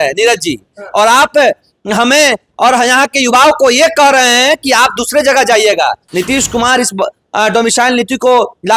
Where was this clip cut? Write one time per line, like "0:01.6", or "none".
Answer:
0:06.0